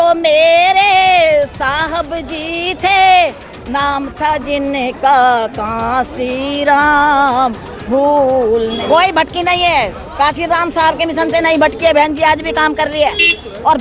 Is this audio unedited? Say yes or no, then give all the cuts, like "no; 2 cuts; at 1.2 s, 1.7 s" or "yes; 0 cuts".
no; 1 cut; at 8.8 s